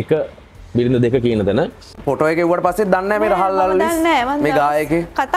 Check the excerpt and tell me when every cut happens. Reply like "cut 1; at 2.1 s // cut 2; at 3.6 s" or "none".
cut 1; at 2.0 s